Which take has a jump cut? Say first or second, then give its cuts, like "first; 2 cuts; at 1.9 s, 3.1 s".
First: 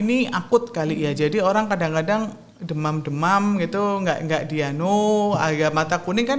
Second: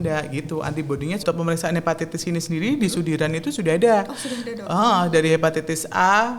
second; 1 cut; at 1.2 s